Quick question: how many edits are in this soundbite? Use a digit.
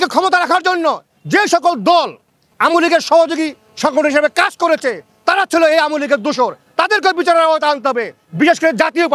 0